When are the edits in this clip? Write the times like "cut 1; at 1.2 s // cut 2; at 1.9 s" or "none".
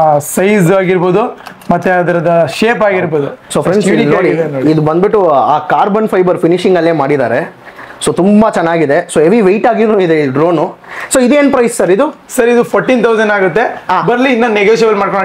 none